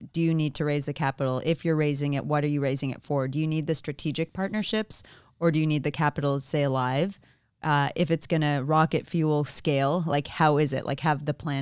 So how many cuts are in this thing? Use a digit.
0